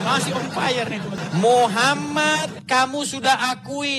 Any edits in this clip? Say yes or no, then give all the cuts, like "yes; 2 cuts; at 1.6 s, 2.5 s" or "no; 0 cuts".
yes; 1 cut; at 1.2 s